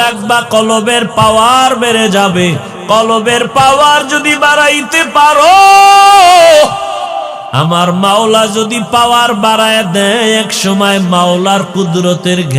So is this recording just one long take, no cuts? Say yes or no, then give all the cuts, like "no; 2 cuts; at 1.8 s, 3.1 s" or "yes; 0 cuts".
yes; 0 cuts